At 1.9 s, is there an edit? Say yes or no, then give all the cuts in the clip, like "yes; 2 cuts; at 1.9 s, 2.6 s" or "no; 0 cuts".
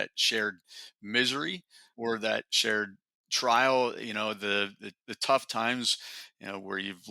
yes; 1 cut; at 1.9 s